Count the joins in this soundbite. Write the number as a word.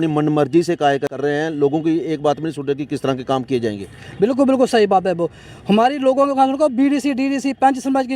one